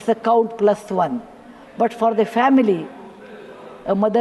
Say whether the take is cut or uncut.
uncut